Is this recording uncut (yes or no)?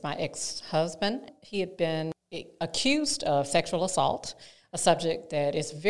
no